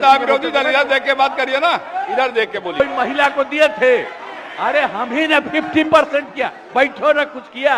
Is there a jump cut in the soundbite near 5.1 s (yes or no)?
no